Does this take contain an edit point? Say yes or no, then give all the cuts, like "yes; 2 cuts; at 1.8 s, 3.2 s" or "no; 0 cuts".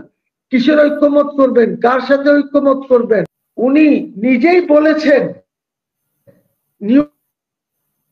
yes; 1 cut; at 3.4 s